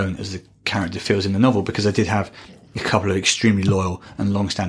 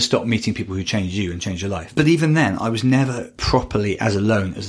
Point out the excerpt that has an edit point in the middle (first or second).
second